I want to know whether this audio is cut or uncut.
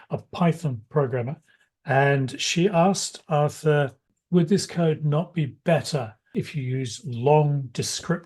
cut